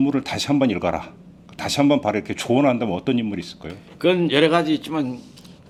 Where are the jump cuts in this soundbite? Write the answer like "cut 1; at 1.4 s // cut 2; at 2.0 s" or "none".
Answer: none